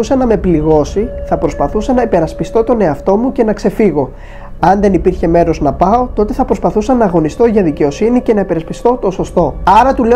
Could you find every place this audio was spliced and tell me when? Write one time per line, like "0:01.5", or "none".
none